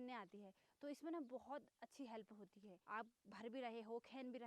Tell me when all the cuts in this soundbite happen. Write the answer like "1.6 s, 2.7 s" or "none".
2.7 s